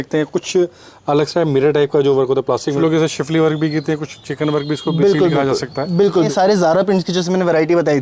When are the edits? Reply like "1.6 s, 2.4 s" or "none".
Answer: 2.8 s, 6.3 s